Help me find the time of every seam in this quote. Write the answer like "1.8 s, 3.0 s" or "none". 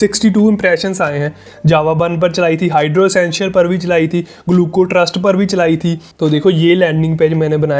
1.5 s, 6.1 s